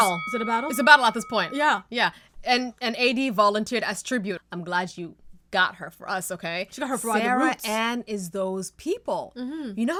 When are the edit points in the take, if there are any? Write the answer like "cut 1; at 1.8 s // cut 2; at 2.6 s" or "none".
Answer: none